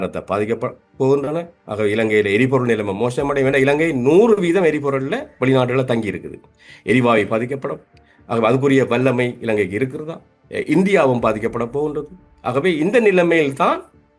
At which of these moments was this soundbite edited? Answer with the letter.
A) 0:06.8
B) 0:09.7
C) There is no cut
C